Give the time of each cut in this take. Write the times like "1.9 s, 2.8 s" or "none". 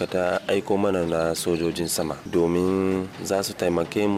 2.2 s, 3.1 s